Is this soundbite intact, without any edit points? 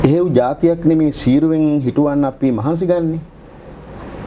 yes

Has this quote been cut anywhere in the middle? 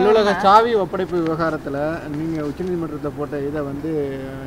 no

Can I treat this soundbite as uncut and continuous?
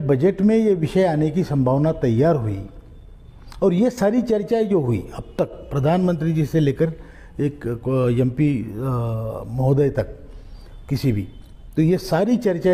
yes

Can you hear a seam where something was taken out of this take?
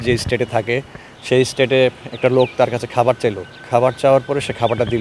no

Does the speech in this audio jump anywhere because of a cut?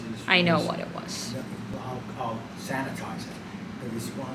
no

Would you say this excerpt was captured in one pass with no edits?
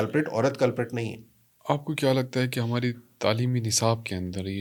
yes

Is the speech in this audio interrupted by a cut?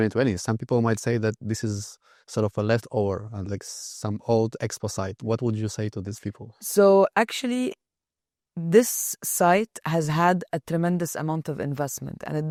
no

